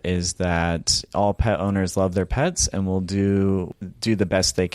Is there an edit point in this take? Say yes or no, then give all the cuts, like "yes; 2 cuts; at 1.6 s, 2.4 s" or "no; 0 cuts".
yes; 1 cut; at 3.7 s